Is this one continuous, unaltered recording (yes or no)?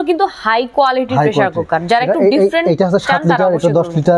yes